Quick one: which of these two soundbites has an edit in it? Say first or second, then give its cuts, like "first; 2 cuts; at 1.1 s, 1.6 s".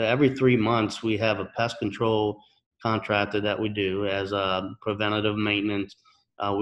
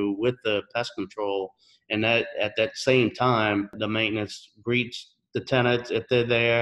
second; 1 cut; at 3.8 s